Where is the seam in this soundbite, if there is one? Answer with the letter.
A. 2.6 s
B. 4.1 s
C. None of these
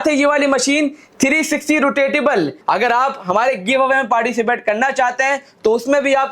A